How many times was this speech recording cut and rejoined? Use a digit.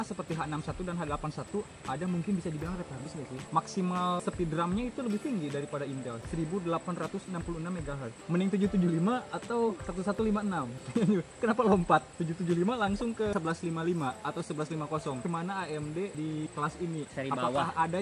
5